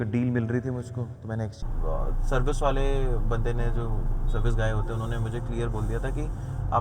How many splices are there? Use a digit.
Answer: 1